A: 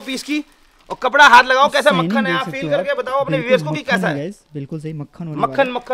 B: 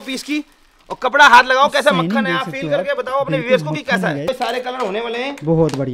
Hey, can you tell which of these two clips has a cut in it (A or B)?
B